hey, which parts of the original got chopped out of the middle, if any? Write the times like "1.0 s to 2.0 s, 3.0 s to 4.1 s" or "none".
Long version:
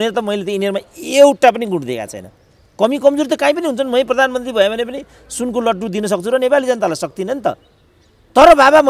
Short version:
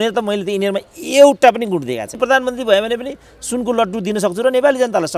2.2 s to 4.1 s